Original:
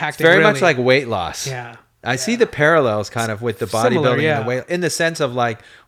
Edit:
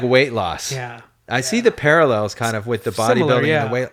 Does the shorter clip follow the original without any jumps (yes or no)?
yes